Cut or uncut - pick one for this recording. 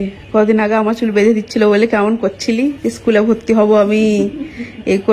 uncut